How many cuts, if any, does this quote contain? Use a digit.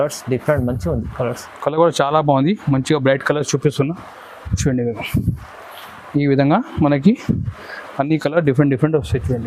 0